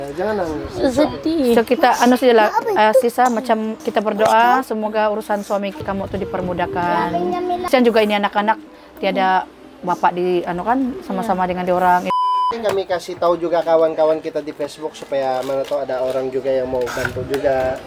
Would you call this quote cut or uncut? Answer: cut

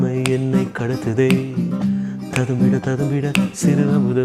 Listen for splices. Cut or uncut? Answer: uncut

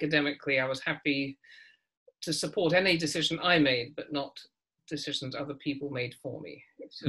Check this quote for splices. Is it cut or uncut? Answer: uncut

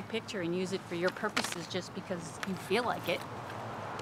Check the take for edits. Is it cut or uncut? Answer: uncut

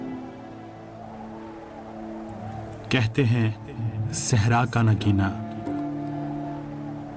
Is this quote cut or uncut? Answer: uncut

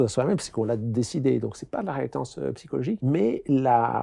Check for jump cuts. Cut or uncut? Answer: cut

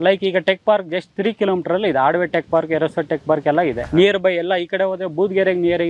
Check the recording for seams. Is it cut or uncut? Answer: cut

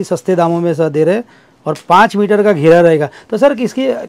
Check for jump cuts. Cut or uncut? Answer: uncut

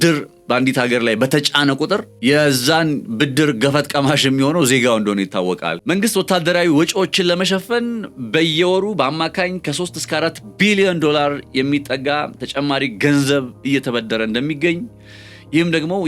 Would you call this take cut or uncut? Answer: cut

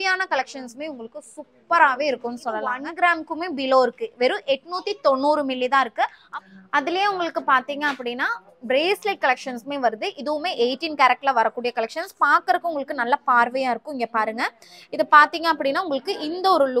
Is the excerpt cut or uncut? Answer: cut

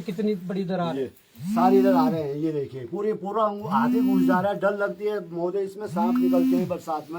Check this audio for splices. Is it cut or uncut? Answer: uncut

